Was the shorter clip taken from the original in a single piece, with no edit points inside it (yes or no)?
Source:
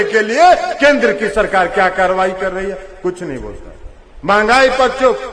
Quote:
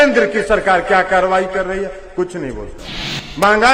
yes